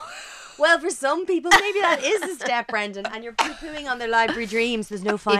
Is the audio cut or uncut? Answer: uncut